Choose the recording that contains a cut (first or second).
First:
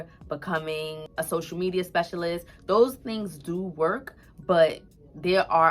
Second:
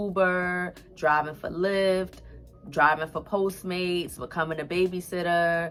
first